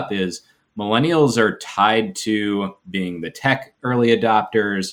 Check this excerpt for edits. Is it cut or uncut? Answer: uncut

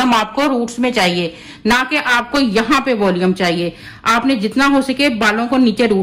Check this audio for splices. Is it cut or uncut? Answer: uncut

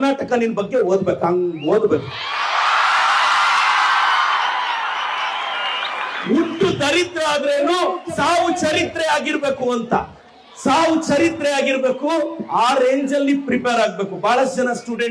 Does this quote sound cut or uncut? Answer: uncut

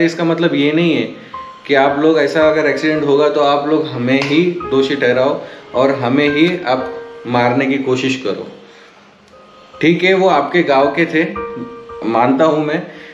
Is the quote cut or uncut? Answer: uncut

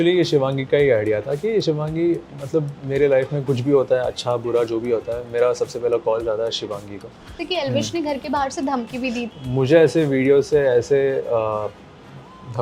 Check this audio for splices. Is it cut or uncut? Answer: cut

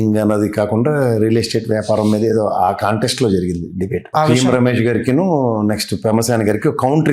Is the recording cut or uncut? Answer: cut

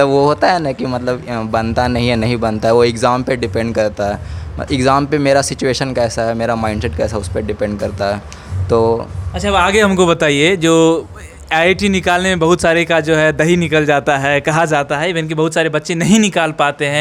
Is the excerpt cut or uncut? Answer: uncut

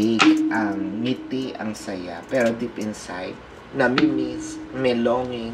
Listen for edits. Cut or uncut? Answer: uncut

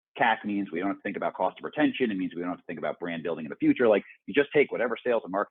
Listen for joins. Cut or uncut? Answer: uncut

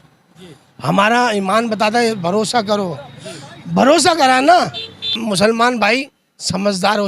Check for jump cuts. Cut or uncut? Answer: cut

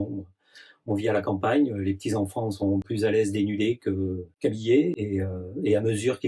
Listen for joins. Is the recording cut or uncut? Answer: cut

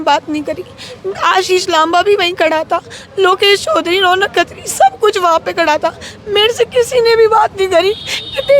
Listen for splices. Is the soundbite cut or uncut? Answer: uncut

